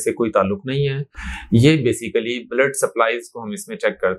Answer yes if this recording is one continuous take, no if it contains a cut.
yes